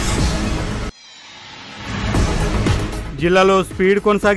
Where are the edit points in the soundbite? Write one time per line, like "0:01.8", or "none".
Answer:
0:01.1
0:02.9